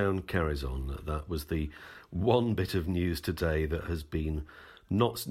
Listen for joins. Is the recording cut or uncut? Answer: uncut